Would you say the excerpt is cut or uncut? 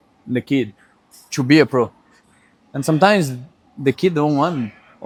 uncut